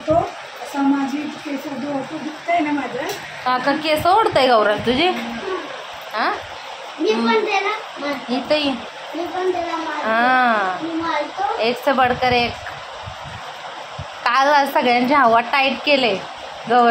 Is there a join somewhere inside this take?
no; 0 cuts

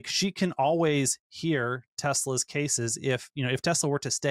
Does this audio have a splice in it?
no; 0 cuts

